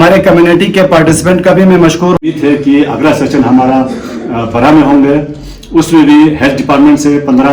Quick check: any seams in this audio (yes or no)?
yes